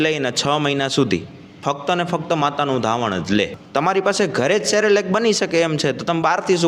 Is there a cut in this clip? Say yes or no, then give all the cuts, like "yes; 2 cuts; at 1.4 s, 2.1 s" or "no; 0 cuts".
yes; 1 cut; at 3.6 s